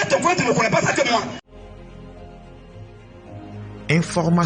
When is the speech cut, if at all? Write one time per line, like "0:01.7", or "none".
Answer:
0:01.7